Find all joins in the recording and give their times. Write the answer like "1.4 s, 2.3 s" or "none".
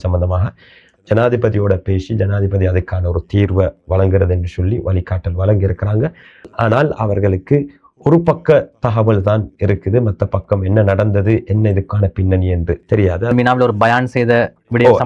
6.5 s, 13.3 s